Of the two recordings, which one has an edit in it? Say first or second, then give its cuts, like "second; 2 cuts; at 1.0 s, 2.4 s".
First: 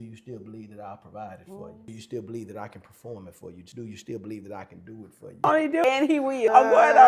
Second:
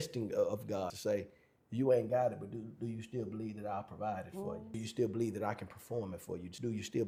first; 1 cut; at 5.4 s